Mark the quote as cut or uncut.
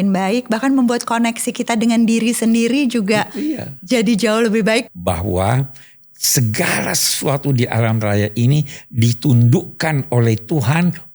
cut